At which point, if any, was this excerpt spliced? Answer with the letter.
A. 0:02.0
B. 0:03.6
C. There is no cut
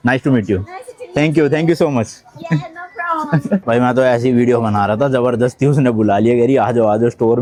C